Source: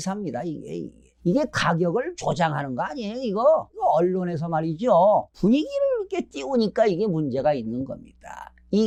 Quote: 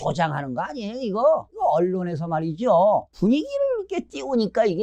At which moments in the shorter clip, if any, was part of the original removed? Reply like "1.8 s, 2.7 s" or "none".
none